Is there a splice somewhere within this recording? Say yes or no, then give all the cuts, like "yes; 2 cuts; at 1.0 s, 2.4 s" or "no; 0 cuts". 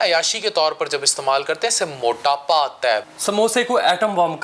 yes; 1 cut; at 3.1 s